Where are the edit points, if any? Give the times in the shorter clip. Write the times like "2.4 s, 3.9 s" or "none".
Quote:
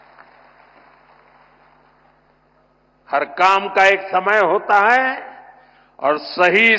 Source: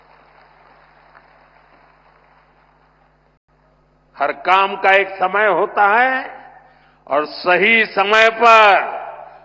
2.4 s